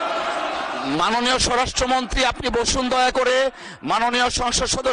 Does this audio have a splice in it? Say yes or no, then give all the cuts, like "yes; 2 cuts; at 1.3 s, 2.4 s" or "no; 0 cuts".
no; 0 cuts